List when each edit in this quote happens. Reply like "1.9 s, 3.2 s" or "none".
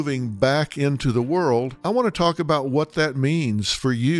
1.8 s